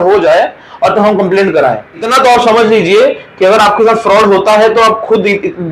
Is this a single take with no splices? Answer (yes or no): no